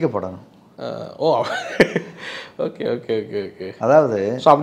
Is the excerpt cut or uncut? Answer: uncut